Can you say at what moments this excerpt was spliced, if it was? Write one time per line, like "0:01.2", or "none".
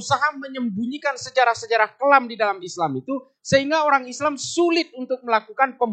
none